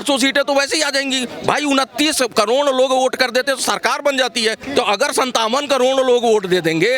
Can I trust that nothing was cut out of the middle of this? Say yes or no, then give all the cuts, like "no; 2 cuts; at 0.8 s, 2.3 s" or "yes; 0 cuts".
no; 1 cut; at 4.6 s